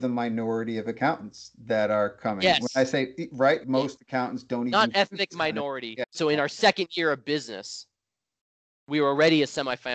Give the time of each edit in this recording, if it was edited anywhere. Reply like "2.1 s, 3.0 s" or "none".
3.6 s, 6.1 s